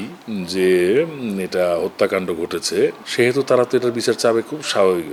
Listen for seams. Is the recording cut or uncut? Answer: uncut